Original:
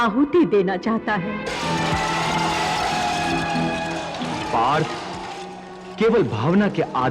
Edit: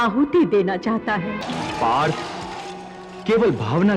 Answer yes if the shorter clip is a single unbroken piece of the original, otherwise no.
no